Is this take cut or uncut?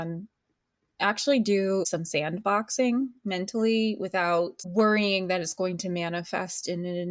cut